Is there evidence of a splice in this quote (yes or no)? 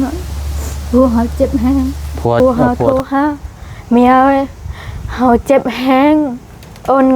yes